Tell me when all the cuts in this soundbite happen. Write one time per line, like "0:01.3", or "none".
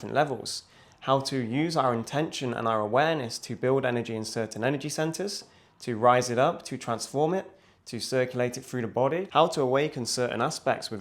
0:09.3